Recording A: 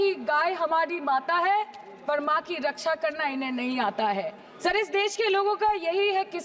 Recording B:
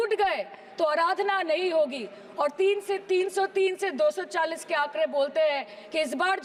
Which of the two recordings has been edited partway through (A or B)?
A